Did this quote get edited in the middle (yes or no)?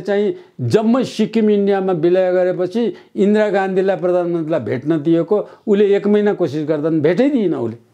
no